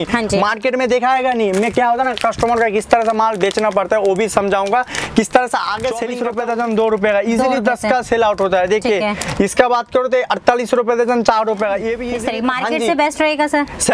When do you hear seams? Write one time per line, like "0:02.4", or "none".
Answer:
0:06.2
0:12.1